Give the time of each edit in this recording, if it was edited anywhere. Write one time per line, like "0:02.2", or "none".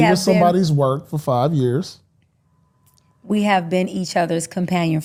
none